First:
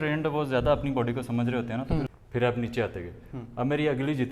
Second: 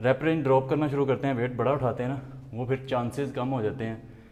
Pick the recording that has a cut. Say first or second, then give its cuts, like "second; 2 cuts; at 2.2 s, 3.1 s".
first; 1 cut; at 2.2 s